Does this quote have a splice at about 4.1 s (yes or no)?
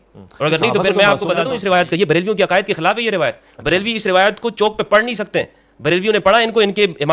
no